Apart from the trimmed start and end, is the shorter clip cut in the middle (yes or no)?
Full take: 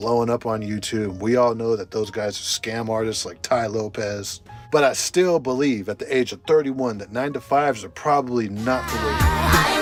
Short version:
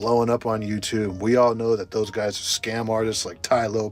no